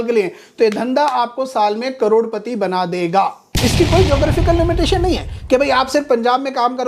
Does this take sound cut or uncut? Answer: cut